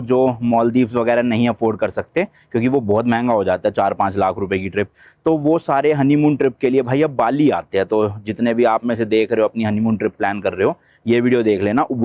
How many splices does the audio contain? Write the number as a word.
zero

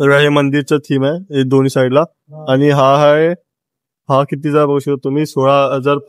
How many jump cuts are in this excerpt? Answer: zero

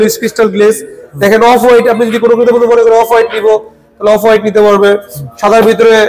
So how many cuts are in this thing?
zero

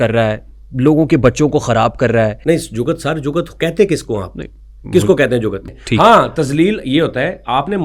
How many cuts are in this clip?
two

